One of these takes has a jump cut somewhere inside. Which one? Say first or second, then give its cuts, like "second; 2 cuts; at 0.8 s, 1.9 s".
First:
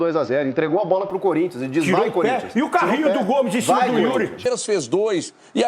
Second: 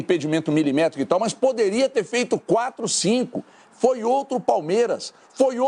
first; 1 cut; at 4.4 s